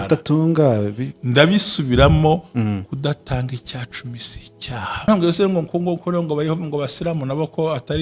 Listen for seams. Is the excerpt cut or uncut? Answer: cut